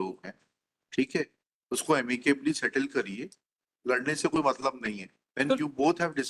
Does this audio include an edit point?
no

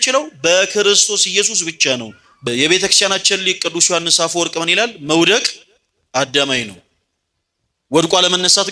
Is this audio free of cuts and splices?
no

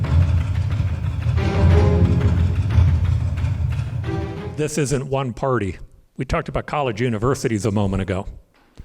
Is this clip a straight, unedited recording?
no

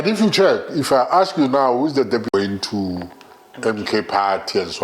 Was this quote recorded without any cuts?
no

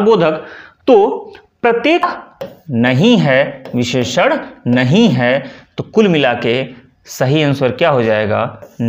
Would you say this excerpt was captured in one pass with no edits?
no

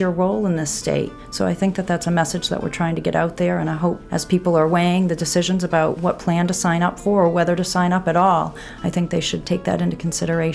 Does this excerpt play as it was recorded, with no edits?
no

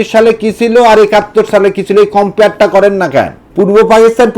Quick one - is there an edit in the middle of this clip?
yes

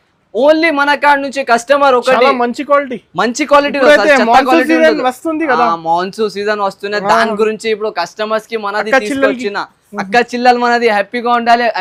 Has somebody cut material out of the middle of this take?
no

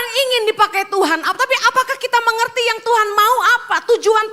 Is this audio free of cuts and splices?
yes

